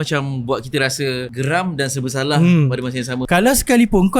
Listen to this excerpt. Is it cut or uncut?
cut